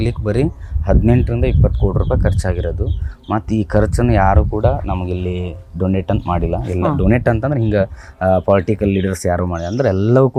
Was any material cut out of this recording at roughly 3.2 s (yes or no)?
no